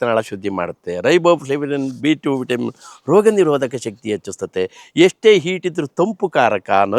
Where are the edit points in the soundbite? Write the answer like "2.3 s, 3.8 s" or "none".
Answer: none

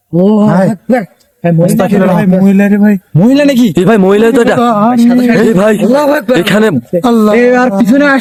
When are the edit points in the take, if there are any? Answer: none

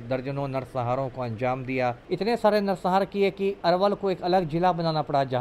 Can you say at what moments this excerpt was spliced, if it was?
2.0 s

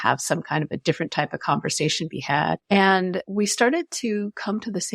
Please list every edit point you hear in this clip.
2.6 s, 3.2 s

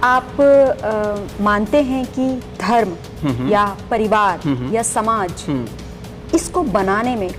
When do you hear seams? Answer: none

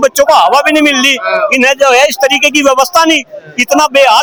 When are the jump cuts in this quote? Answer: none

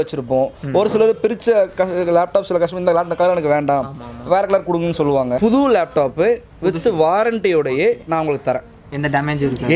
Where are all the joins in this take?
5.4 s

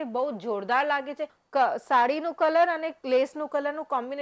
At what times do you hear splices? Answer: 1.3 s

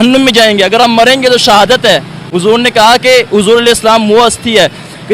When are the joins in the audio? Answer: none

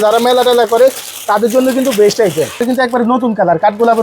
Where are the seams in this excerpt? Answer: 2.6 s

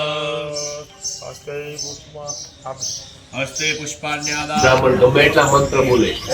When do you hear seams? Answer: 4.6 s

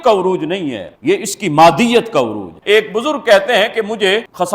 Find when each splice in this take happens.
2.5 s

